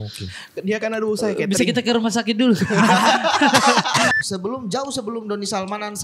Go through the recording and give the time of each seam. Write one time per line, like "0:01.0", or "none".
0:04.2